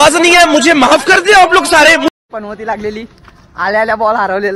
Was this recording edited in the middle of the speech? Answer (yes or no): yes